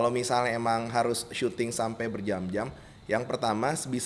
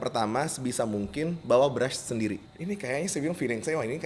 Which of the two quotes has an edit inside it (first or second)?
second